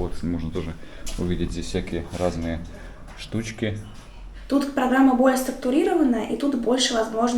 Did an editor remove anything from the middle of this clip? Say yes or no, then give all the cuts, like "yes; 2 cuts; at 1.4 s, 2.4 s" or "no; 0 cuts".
yes; 1 cut; at 4.1 s